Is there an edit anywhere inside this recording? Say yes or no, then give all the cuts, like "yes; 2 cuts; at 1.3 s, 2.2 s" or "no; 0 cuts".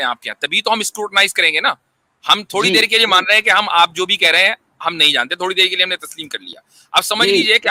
no; 0 cuts